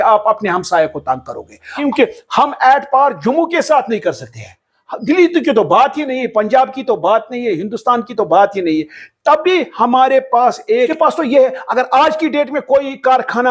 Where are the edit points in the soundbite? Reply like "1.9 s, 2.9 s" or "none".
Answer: 1.8 s, 10.9 s